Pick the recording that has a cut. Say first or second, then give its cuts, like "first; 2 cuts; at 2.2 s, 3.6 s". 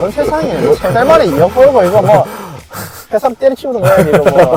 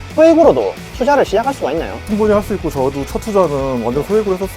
second; 1 cut; at 2.0 s